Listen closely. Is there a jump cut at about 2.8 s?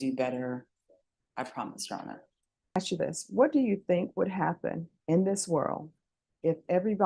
yes; 1 cut; at 2.8 s

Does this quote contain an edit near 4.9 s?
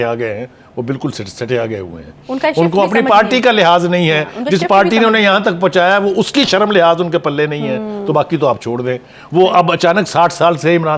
no; 0 cuts

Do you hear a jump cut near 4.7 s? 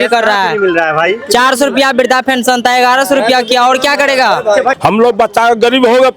yes; 1 cut; at 4.7 s

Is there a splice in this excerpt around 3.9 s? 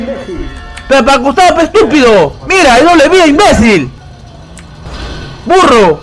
yes; 1 cut; at 3.9 s

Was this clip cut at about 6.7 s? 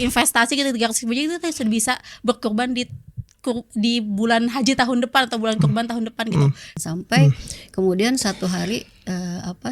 yes; 1 cut; at 6.7 s

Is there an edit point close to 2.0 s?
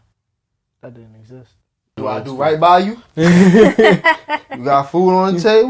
yes; 1 cut; at 2.0 s

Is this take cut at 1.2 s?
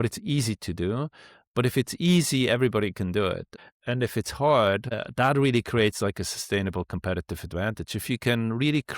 no; 2 cuts; at 3.6 s, 5.0 s

